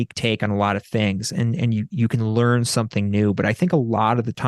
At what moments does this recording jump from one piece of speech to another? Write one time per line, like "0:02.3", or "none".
none